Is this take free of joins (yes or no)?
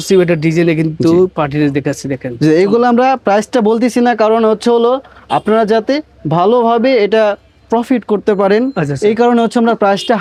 yes